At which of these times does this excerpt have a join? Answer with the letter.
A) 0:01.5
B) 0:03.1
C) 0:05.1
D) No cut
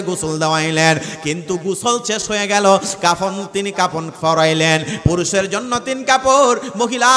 D